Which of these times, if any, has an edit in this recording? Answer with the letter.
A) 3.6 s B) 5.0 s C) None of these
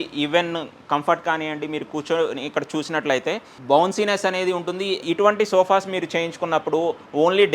B